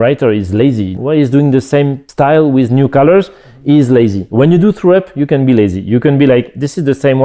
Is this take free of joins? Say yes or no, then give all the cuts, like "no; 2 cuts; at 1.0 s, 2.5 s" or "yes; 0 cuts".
no; 2 cuts; at 0.9 s, 2.0 s